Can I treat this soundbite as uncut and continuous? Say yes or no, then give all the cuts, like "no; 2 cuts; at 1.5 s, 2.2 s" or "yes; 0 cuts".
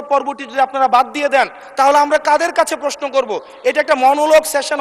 yes; 0 cuts